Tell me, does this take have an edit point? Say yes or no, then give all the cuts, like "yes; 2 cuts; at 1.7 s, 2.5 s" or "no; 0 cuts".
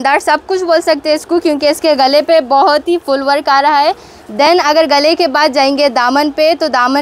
no; 0 cuts